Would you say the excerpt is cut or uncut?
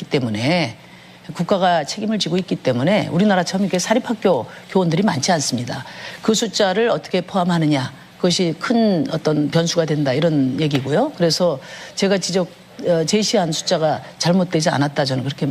cut